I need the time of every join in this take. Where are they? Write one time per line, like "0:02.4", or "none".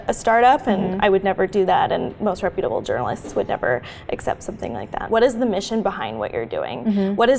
0:05.1